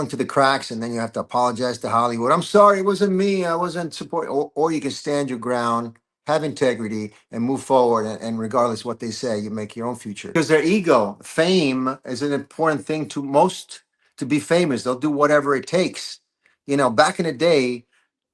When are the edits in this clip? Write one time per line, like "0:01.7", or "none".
0:10.3